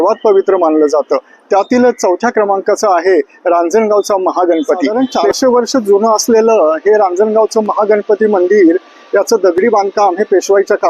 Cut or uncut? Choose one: cut